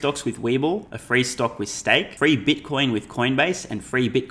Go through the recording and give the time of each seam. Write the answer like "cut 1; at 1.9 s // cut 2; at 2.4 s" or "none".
cut 1; at 0.9 s // cut 2; at 2.1 s